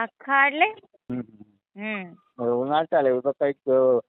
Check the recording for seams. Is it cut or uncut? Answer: cut